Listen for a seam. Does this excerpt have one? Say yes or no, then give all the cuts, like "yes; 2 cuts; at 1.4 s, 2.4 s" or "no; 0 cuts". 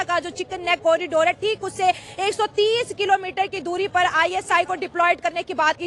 no; 0 cuts